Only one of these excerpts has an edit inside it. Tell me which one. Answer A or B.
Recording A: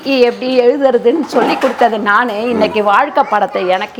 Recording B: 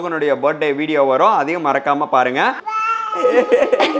B